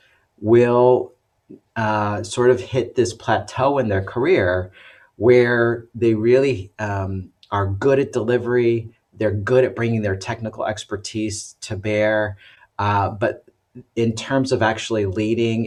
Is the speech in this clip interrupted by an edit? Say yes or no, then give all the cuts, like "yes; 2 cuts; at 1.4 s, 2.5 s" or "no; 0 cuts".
no; 0 cuts